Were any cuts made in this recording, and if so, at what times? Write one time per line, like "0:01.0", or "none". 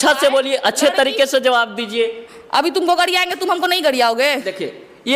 none